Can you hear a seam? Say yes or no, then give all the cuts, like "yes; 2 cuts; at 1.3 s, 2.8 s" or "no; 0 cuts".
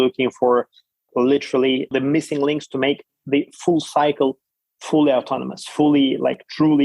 yes; 1 cut; at 1.9 s